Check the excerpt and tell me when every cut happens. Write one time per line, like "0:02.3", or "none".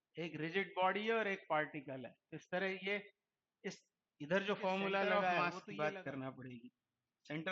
0:05.4